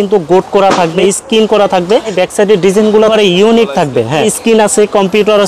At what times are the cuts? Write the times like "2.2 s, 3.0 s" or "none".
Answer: 1.0 s, 2.1 s, 3.1 s, 4.3 s